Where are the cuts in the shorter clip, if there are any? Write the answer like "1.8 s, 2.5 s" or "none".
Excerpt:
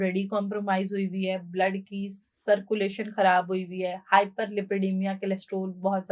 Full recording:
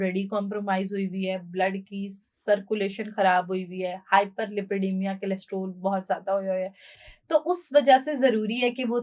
none